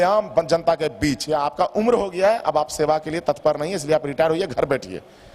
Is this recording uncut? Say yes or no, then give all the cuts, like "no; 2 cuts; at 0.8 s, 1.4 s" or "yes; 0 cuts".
no; 1 cut; at 1.2 s